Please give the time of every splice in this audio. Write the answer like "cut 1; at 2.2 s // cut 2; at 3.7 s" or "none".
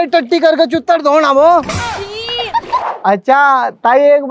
cut 1; at 2.8 s

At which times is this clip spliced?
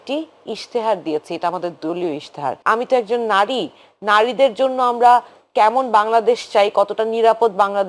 cut 1; at 2.5 s

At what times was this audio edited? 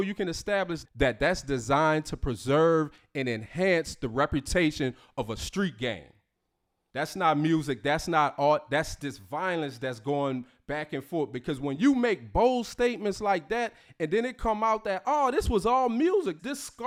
none

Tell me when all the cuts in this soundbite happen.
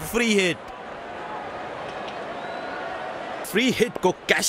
cut 1; at 1.1 s // cut 2; at 3.4 s

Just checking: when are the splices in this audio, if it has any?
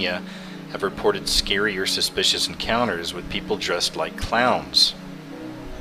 none

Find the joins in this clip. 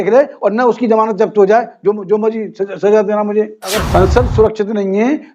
cut 1; at 3.8 s

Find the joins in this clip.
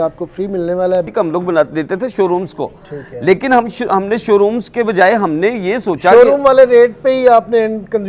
cut 1; at 1.1 s

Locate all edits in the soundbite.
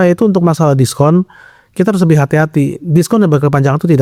none

